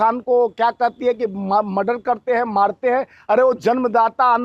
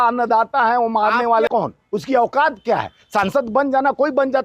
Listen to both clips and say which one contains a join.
second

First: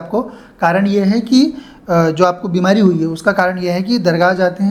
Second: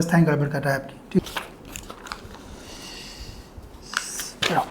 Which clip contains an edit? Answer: second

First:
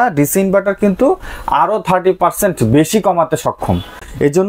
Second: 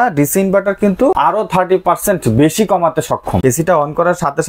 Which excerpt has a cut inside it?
second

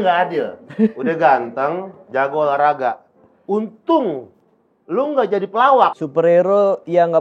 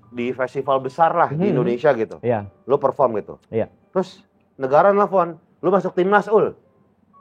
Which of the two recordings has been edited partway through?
first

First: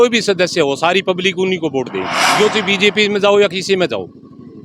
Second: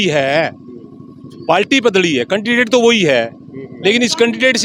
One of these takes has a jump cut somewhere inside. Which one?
first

